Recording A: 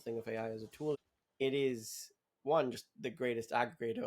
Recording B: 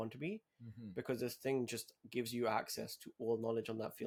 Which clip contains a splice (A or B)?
A